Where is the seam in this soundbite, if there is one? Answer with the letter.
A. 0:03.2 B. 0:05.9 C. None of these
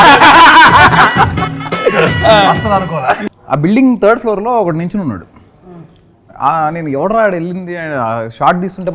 A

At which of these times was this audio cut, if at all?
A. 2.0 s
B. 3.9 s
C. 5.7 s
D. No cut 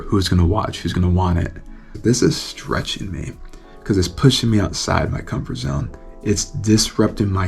A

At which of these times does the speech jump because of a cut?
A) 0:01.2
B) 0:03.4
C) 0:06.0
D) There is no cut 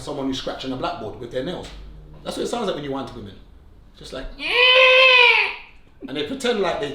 D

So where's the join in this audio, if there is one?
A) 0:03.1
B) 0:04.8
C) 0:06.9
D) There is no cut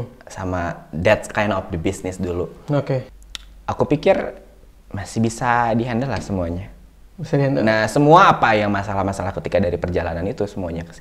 A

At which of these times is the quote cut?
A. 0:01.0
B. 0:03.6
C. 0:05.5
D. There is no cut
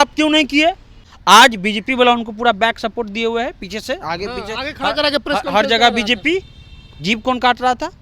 A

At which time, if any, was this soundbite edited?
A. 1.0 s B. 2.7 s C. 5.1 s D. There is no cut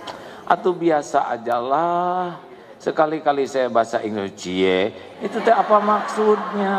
D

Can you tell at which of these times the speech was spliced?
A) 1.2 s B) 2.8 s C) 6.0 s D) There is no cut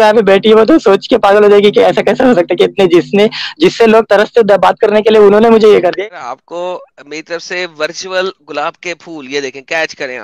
C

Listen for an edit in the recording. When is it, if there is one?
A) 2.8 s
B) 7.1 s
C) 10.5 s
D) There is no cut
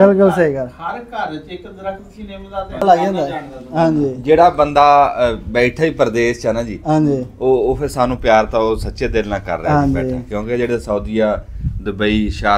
A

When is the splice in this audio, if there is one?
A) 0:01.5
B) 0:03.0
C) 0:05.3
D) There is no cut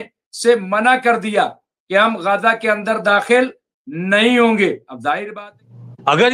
C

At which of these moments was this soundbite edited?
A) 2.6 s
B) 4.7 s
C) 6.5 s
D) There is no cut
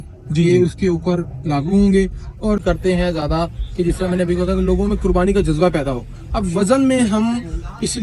A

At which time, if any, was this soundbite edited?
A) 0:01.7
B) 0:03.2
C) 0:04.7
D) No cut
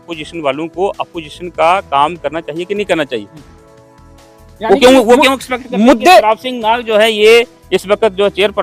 D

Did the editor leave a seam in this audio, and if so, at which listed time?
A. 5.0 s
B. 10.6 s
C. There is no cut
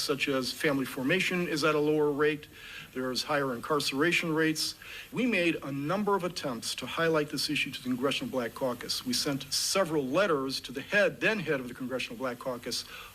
A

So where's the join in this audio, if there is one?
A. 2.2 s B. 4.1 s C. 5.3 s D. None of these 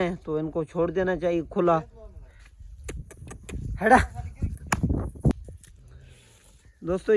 C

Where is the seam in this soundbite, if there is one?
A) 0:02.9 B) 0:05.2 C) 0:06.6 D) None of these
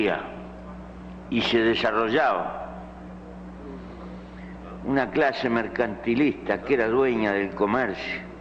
B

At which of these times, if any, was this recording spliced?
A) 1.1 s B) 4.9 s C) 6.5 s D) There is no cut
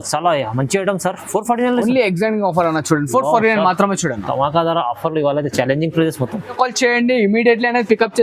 C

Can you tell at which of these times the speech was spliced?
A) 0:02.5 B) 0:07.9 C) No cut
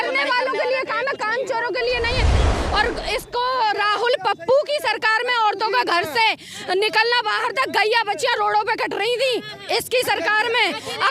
A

